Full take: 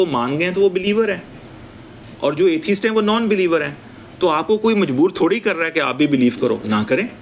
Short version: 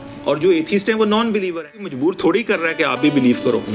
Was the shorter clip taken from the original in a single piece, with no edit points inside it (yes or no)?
no